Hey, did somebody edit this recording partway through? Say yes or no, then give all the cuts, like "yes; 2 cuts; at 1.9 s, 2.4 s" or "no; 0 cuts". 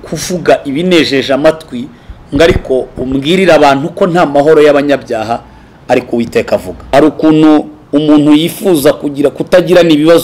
yes; 1 cut; at 6.9 s